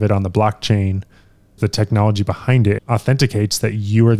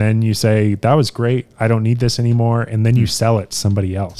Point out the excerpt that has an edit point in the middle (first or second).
first